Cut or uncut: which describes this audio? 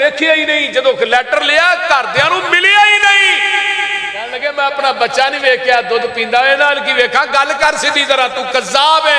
cut